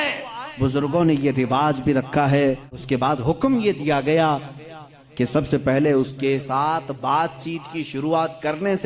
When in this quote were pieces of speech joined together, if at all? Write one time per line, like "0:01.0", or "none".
0:02.7